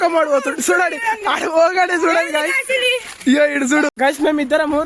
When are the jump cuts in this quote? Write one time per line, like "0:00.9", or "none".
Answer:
0:03.9